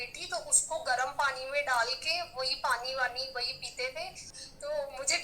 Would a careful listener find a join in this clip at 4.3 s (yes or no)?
yes